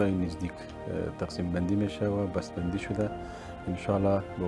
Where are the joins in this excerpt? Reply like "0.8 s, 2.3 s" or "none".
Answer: none